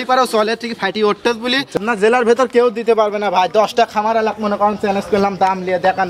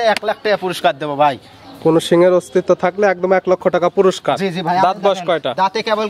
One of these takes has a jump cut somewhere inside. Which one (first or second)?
first